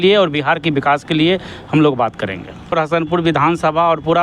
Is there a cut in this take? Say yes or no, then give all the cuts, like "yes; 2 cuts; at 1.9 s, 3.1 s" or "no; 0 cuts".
yes; 1 cut; at 2.7 s